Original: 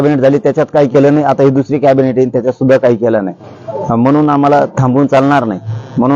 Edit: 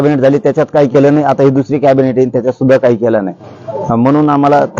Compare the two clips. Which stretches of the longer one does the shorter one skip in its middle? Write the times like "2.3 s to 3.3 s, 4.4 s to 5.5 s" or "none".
none